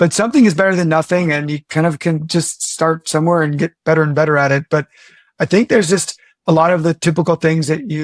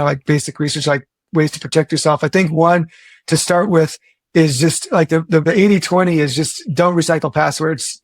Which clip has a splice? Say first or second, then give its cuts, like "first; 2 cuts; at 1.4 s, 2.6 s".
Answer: second; 1 cut; at 5.4 s